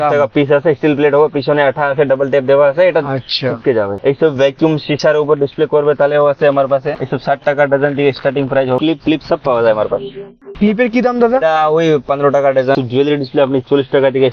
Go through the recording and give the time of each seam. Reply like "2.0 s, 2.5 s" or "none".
8.8 s, 12.7 s